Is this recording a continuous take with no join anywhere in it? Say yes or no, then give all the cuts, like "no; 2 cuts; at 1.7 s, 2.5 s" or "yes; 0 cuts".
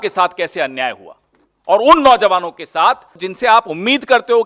no; 1 cut; at 3.3 s